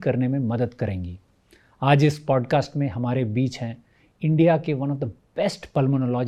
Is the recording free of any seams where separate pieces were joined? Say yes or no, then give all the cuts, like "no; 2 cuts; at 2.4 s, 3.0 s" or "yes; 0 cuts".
yes; 0 cuts